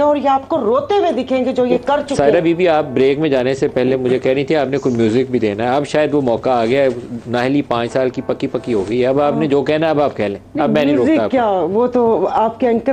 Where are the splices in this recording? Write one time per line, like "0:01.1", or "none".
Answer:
0:02.1